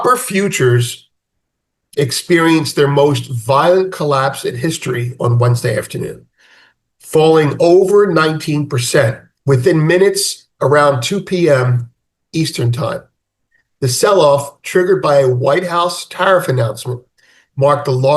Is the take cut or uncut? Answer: uncut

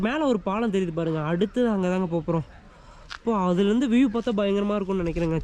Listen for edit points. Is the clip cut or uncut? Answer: uncut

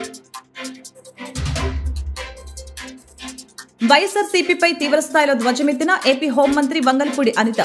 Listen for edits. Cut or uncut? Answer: cut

